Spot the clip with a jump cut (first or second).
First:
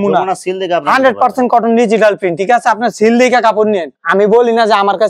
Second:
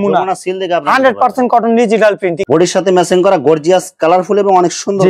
second